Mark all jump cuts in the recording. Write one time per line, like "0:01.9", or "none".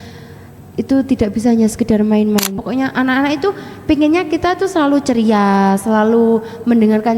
0:02.6